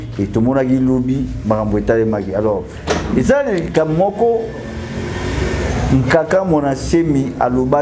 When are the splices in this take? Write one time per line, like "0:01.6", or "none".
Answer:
none